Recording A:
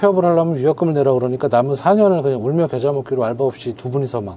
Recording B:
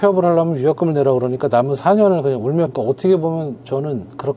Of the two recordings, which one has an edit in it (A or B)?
B